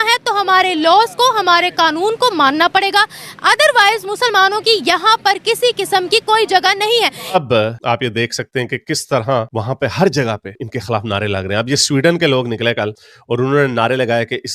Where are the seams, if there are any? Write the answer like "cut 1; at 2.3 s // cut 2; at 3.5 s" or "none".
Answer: cut 1; at 7.3 s